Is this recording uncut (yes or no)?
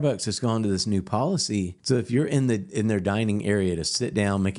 no